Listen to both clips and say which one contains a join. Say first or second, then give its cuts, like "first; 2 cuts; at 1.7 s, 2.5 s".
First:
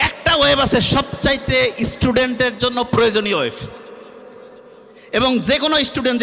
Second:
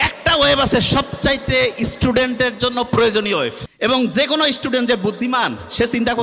second; 1 cut; at 3.6 s